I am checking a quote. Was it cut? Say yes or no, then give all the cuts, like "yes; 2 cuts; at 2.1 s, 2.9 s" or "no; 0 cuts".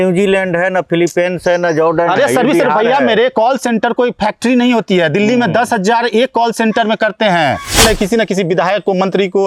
yes; 1 cut; at 7.8 s